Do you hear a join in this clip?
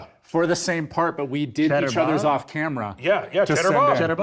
no; 0 cuts

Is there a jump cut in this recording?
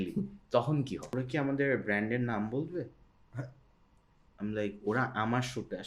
yes; 1 cut; at 1.1 s

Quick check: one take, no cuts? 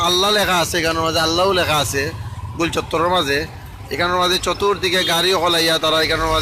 yes; 0 cuts

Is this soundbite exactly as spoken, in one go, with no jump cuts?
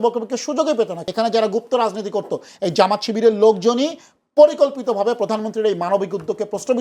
no; 1 cut; at 1.0 s

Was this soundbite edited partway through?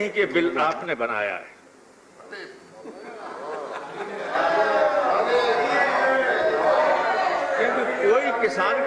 no; 0 cuts

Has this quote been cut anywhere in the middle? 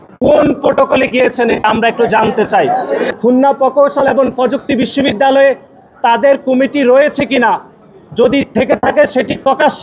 yes; 1 cut; at 3.1 s

